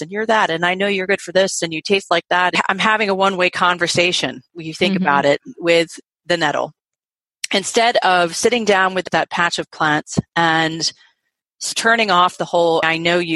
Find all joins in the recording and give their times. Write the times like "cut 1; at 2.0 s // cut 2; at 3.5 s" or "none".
cut 1; at 2.5 s // cut 2; at 9.0 s